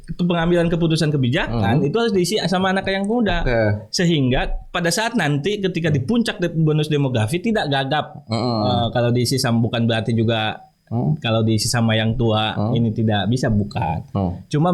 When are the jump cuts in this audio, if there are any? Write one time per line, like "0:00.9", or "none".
none